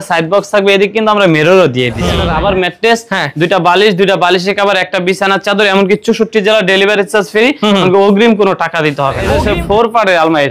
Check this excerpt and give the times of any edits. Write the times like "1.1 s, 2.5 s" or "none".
2.2 s, 9.2 s